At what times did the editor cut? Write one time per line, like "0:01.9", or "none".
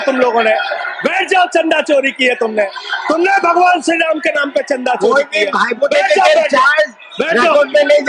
none